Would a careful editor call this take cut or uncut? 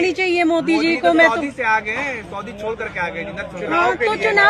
uncut